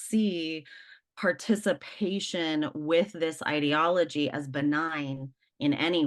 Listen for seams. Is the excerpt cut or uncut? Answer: uncut